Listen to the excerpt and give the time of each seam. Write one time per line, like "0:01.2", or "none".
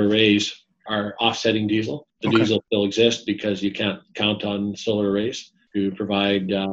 0:00.8
0:02.0
0:02.6
0:05.5